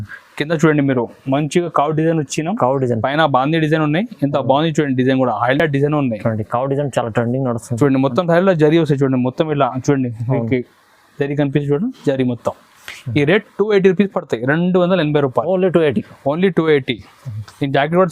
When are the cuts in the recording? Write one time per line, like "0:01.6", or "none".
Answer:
none